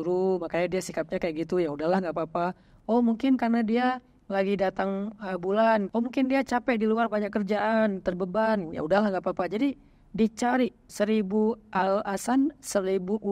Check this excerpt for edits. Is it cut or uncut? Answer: cut